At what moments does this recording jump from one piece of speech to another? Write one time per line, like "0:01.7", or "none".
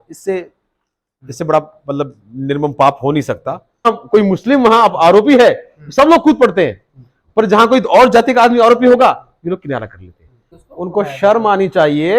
0:03.9
0:10.5